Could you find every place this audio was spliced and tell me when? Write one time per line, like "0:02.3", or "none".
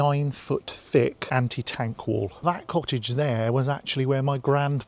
0:01.2
0:02.4